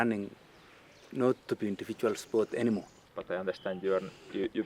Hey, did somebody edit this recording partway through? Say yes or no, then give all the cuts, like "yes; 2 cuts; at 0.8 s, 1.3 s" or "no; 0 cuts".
yes; 1 cut; at 3.0 s